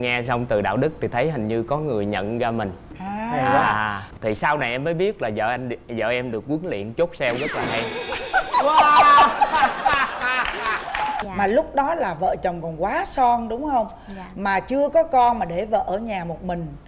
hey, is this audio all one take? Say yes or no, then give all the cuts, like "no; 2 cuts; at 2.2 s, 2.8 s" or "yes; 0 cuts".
no; 1 cut; at 11.2 s